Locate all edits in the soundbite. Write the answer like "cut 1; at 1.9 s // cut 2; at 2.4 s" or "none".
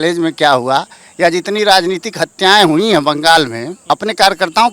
cut 1; at 3.7 s